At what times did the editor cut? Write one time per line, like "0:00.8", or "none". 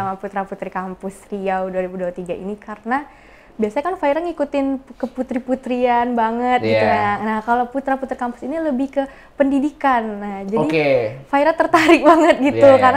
none